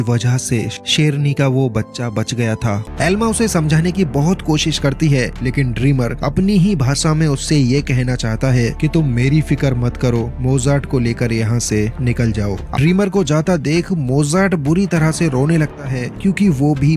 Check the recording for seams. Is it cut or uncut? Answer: cut